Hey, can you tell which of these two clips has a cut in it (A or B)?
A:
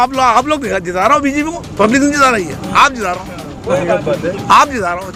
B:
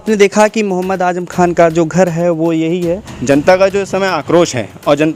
B